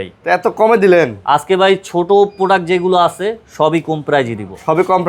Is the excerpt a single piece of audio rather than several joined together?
yes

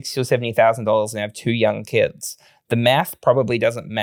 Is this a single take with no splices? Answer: yes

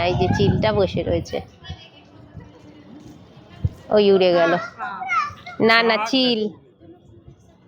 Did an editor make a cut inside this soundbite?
no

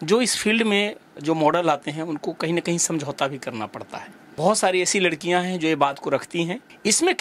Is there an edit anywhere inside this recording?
yes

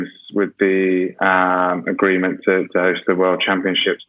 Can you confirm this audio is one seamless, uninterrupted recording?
yes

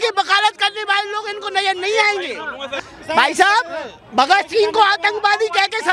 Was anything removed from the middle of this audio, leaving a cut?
yes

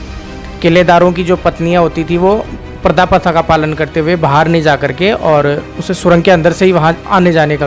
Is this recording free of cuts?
yes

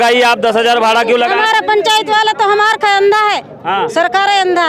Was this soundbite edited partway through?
no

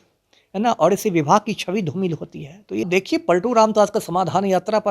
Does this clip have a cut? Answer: yes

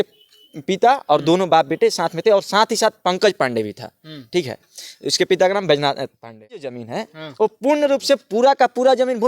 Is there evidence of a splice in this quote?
yes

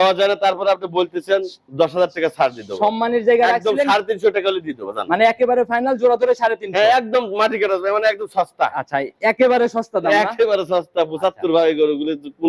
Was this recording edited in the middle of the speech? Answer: no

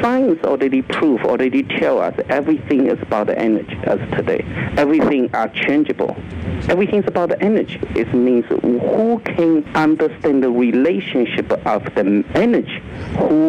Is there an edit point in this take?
yes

